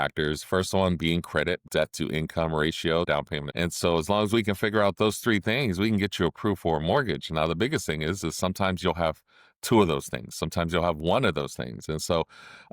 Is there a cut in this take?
yes; 2 cuts; at 1.6 s, 3.1 s

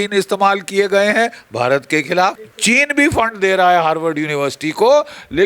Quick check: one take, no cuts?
no; 1 cut; at 2.5 s

